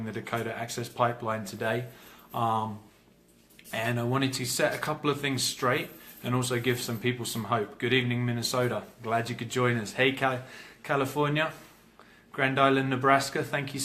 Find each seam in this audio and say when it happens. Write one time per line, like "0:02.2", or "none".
0:05.2